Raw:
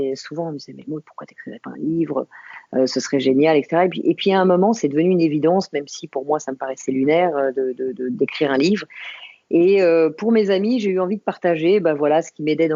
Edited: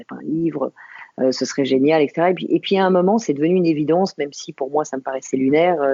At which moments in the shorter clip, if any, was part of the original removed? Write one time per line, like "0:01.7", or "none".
none